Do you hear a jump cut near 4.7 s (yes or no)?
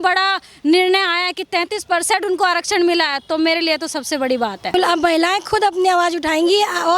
yes